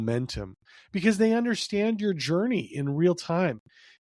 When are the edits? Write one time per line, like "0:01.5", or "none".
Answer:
none